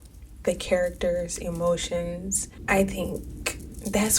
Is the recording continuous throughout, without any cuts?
no; 1 cut; at 2.5 s

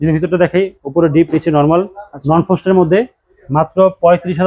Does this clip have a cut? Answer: no; 0 cuts

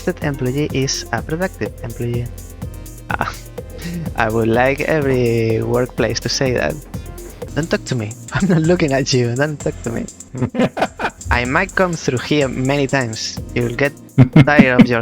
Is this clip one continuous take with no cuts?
no; 4 cuts; at 7.4 s, 8.2 s, 10.2 s, 11.2 s

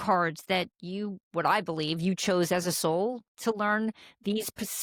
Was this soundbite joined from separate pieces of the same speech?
no; 0 cuts

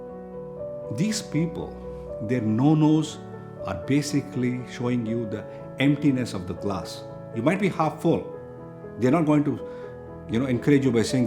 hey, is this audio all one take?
no; 1 cut; at 0.9 s

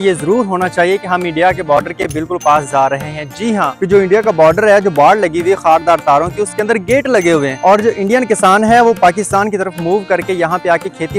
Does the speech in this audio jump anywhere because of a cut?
yes; 2 cuts; at 3.7 s, 7.5 s

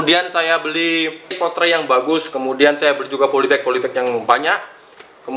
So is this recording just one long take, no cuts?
no; 1 cut; at 1.4 s

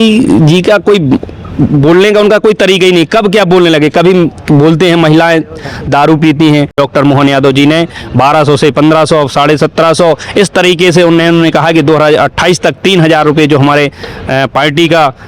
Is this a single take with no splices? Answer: no; 1 cut; at 6.8 s

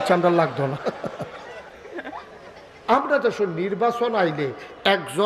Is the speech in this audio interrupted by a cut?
yes; 1 cut; at 2.6 s

